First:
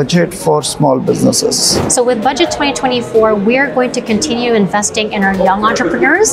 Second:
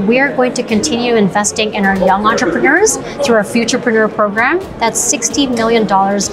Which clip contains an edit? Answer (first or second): first